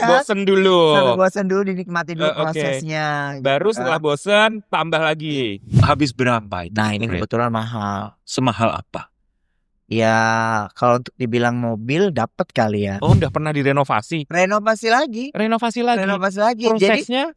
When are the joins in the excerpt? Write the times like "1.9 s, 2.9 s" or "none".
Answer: 5.8 s, 13.1 s